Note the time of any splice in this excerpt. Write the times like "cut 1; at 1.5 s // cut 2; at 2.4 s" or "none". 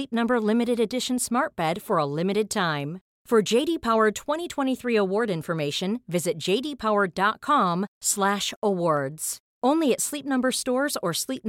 none